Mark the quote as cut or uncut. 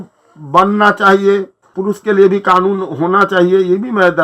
cut